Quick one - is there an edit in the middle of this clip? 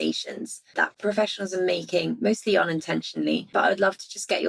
yes; 2 cuts; at 0.9 s, 3.5 s

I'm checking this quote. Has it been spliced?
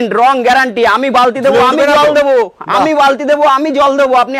no; 0 cuts

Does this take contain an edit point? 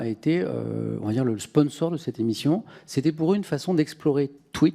no; 0 cuts

